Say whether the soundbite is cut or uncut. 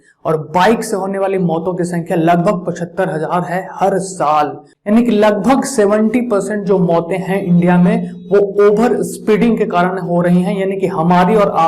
cut